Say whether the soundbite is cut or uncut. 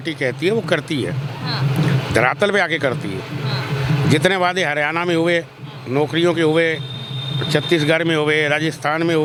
uncut